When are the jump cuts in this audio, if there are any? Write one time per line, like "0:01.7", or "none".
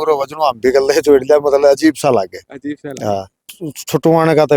0:03.5